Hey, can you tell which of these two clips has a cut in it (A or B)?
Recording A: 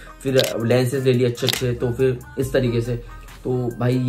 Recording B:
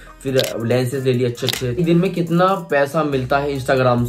B